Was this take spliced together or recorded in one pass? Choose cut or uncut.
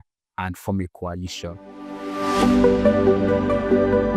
cut